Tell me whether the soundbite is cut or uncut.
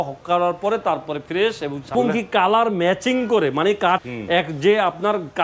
cut